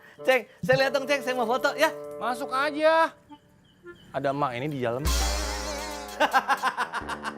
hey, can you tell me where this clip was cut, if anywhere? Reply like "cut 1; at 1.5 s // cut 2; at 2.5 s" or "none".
none